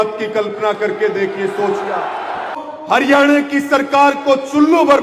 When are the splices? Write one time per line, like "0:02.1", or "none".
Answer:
0:02.6